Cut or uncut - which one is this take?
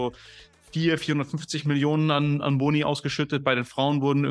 uncut